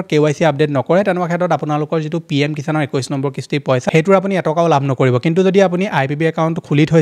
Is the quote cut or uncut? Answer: uncut